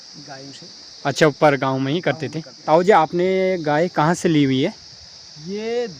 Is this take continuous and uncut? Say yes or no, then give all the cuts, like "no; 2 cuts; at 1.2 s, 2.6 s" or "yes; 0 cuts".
no; 1 cut; at 2.6 s